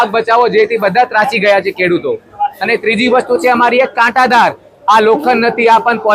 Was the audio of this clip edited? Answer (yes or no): no